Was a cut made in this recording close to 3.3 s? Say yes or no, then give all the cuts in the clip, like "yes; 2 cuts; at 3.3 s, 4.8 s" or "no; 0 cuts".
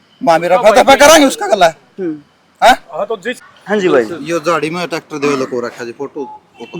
yes; 1 cut; at 3.3 s